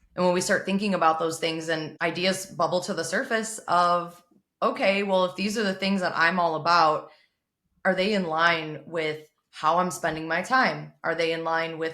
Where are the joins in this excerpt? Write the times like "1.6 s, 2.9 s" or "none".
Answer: 1.9 s